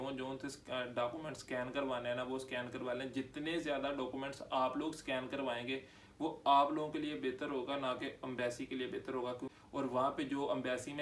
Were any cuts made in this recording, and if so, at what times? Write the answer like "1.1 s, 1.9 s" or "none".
9.5 s